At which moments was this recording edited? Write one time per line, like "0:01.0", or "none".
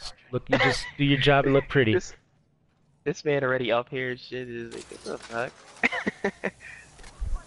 none